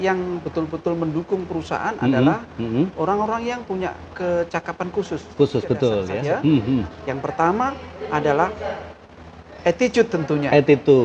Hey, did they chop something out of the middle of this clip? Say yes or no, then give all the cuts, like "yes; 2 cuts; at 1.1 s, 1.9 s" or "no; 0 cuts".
yes; 1 cut; at 6.3 s